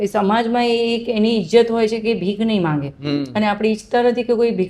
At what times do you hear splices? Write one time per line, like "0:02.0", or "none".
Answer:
none